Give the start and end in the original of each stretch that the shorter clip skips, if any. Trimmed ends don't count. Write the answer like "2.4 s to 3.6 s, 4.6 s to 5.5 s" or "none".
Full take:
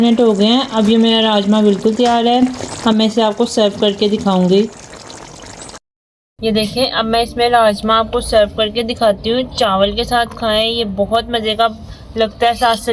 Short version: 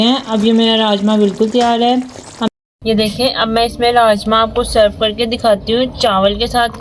2.9 s to 6.1 s

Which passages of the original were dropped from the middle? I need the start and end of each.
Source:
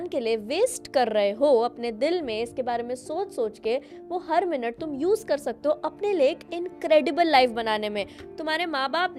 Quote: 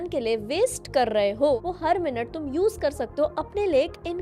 1.6 s to 4.0 s

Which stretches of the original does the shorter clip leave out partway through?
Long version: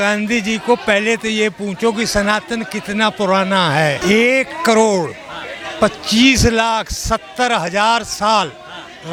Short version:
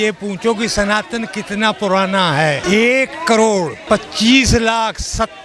5.1 s to 5.7 s

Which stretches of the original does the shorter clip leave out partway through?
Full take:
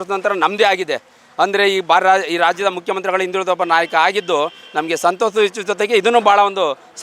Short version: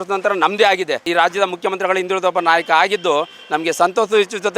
1.1 s to 2.3 s

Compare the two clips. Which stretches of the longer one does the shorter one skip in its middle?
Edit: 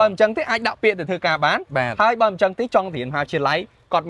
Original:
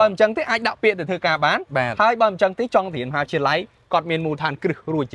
none

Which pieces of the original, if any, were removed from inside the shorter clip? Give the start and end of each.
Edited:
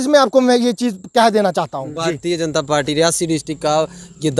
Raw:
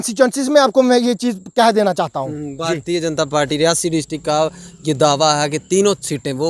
2.3 s to 2.5 s

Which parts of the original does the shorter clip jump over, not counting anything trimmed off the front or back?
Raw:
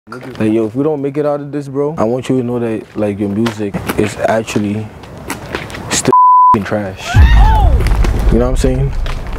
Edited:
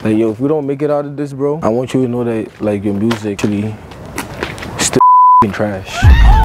3.7 s to 4.5 s

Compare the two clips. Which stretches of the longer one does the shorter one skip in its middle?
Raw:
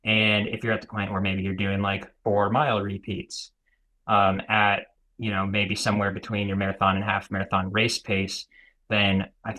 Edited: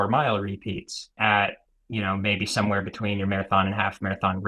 3.6 s to 4.4 s

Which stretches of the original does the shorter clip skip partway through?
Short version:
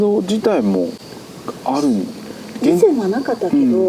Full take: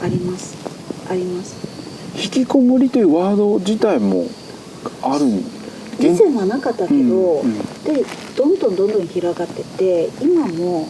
none

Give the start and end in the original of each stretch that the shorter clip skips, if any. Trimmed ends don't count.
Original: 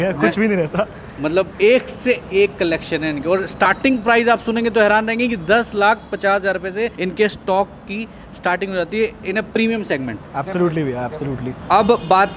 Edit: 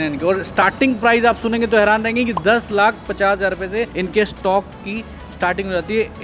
none

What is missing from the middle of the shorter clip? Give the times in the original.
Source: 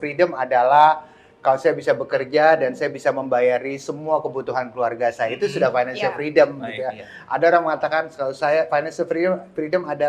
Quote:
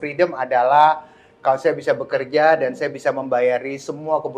none

